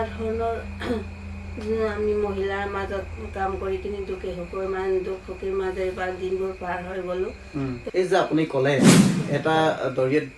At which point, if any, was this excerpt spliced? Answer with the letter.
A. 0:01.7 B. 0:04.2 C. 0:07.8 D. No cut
C